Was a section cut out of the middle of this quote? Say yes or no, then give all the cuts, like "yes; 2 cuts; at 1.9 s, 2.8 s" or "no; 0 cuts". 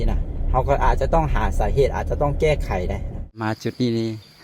yes; 1 cut; at 3.4 s